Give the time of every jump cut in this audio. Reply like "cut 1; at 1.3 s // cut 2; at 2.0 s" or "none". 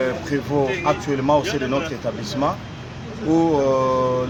none